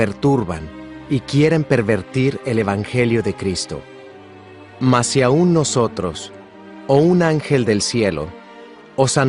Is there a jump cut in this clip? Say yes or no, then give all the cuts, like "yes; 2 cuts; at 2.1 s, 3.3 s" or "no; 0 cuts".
yes; 1 cut; at 5.1 s